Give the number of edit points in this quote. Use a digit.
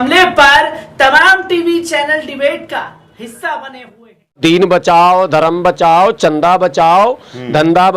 1